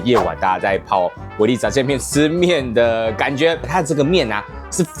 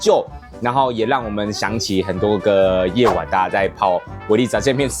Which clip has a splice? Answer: first; 1 cut; at 3.7 s

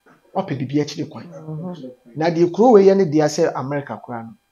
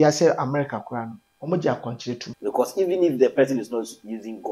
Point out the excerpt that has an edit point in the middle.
second; 1 cut; at 2.3 s

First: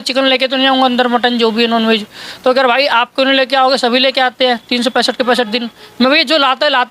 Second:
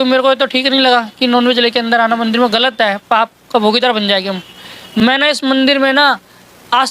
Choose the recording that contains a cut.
second; 1 cut; at 5.0 s

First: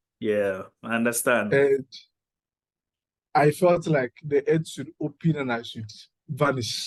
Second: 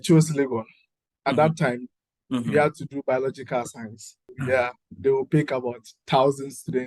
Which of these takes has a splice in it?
second; 1 cut; at 4.3 s

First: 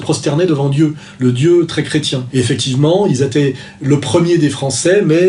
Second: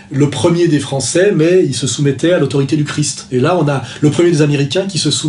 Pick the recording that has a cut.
first; 1 cut; at 2.2 s

